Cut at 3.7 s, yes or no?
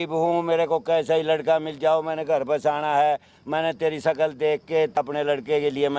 no